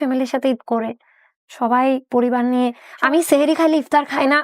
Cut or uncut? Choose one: cut